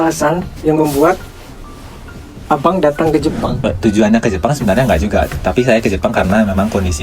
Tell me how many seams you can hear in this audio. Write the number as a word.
one